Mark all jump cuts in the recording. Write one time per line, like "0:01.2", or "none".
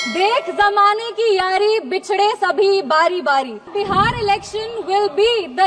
0:03.7